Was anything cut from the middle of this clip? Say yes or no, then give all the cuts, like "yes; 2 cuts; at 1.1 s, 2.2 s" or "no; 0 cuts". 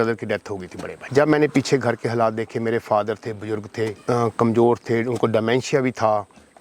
yes; 1 cut; at 0.9 s